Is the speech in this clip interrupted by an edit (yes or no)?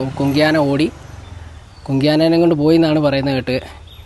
no